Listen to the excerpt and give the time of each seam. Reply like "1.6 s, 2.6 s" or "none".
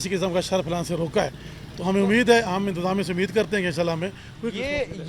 none